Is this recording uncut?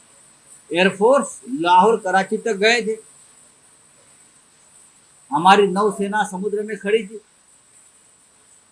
yes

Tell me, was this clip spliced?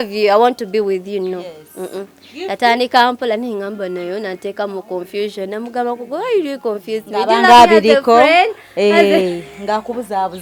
no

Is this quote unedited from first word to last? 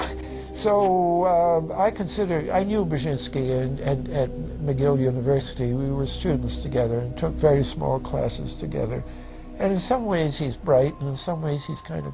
yes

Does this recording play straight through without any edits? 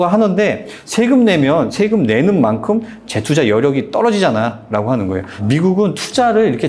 yes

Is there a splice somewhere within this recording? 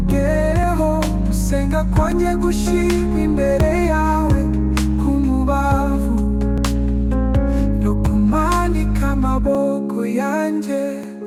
no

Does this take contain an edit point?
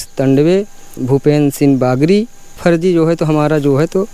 yes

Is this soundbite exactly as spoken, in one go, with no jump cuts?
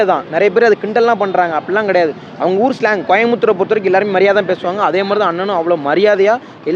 yes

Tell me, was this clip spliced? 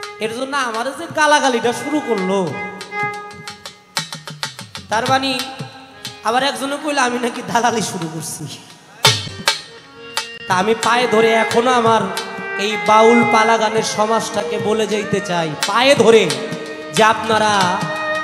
yes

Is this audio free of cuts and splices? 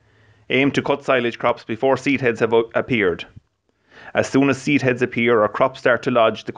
no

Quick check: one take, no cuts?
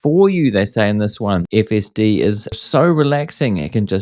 no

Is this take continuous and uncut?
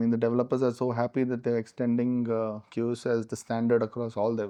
yes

